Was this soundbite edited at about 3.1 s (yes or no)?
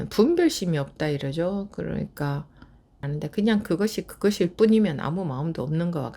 yes